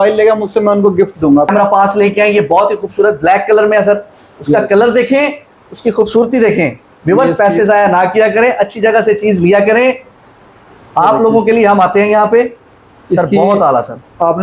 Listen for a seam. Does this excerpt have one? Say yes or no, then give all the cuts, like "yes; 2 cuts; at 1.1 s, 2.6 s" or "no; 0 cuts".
yes; 1 cut; at 1.5 s